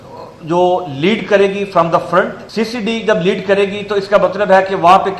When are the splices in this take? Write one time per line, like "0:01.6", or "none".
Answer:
0:02.4